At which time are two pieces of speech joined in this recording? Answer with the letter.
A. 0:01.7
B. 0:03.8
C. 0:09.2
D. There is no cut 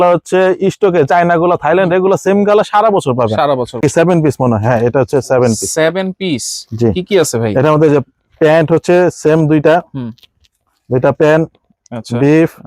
B